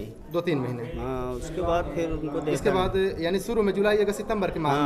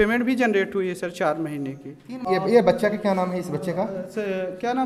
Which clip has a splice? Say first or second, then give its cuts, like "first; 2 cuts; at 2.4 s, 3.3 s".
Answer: second; 1 cut; at 2.2 s